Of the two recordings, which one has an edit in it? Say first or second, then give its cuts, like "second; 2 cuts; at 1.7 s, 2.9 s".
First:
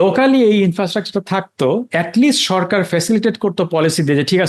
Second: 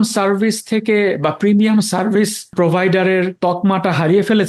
second; 2 cuts; at 2.5 s, 3.3 s